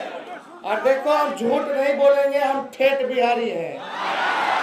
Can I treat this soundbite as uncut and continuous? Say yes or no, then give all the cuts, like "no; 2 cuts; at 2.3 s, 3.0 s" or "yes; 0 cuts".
yes; 0 cuts